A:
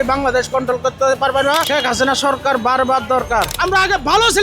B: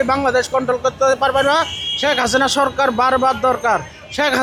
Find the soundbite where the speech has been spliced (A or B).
A